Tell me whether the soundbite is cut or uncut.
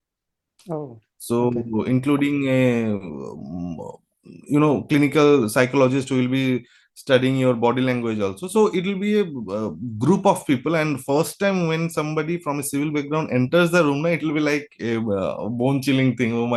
uncut